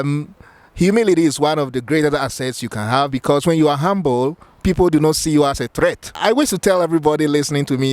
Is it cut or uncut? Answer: cut